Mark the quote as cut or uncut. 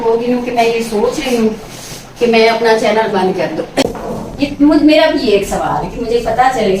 cut